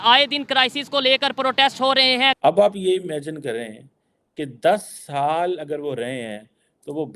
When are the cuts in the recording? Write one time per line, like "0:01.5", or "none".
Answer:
0:02.4